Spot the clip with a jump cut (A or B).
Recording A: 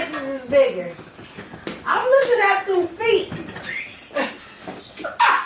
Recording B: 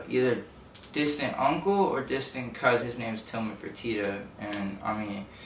B